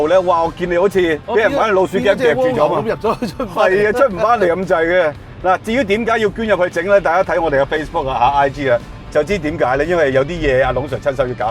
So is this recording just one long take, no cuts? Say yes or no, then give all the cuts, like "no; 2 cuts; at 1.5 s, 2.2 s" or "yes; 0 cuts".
yes; 0 cuts